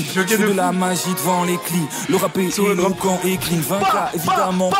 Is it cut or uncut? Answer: uncut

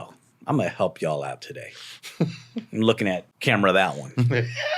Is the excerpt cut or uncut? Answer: cut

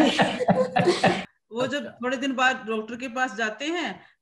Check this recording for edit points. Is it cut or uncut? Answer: cut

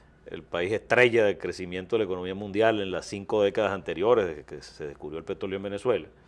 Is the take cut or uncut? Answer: uncut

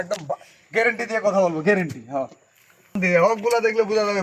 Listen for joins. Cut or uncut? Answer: cut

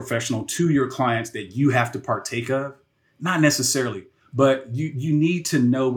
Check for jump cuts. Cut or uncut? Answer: uncut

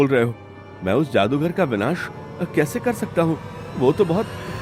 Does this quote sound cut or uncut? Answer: uncut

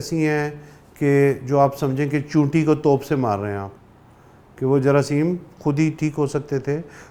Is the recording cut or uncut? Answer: uncut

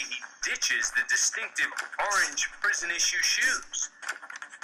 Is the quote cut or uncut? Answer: uncut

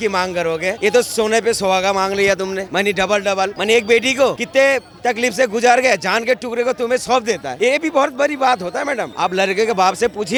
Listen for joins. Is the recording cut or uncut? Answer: uncut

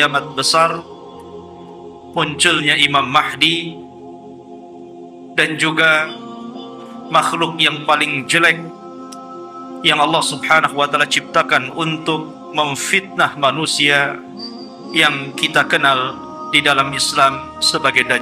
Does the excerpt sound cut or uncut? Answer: uncut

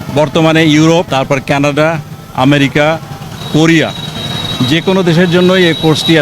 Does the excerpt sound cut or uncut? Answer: cut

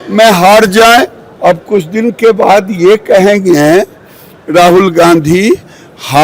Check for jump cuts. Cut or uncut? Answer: cut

